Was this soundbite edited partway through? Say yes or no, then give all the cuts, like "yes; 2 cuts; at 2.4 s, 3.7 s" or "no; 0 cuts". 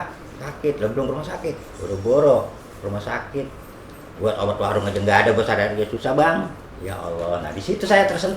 no; 0 cuts